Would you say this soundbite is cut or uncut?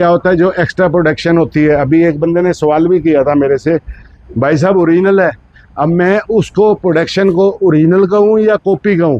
uncut